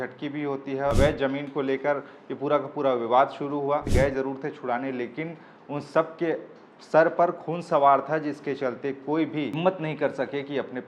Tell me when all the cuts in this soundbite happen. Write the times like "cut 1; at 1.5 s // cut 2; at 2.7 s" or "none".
cut 1; at 0.9 s // cut 2; at 3.9 s // cut 3; at 9.6 s